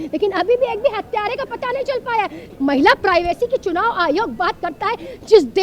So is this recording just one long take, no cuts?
no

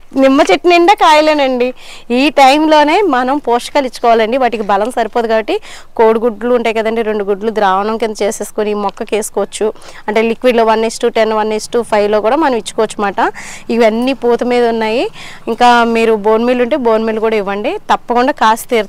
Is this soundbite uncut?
yes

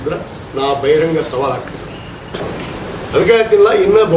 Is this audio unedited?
no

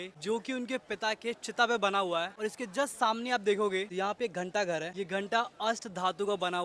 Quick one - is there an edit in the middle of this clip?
no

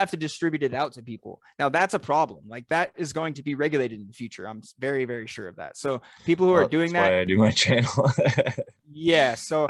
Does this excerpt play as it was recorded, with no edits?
yes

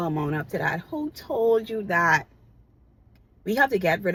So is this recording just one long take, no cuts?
yes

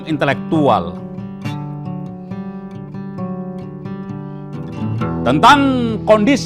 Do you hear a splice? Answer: no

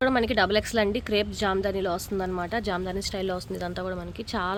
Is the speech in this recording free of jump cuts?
yes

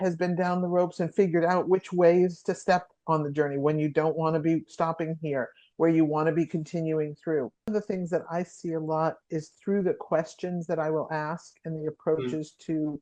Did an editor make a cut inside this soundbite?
yes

